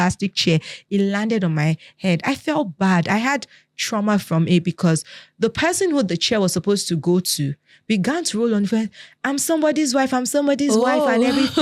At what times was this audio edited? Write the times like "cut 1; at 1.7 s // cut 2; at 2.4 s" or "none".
none